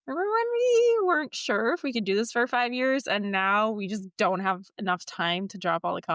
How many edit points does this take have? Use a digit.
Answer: 0